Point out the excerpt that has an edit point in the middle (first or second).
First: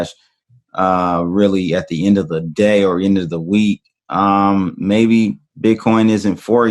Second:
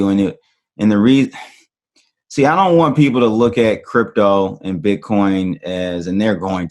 first